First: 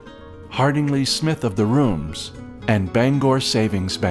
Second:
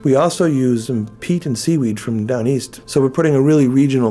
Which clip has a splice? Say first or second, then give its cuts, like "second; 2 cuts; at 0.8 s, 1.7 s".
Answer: second; 2 cuts; at 0.8 s, 2.8 s